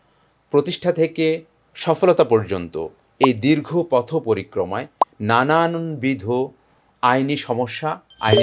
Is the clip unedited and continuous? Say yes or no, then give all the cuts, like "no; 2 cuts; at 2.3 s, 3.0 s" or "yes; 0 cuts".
yes; 0 cuts